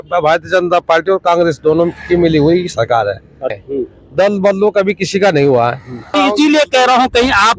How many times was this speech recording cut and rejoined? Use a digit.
2